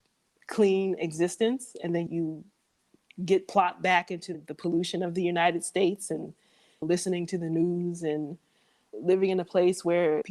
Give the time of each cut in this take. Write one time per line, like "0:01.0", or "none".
0:02.1
0:04.4